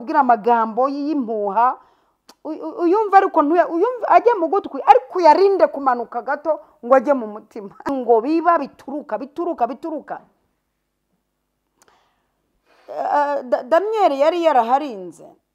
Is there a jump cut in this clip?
yes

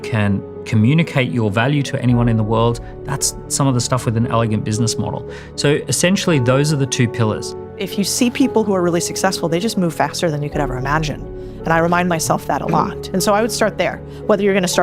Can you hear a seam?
yes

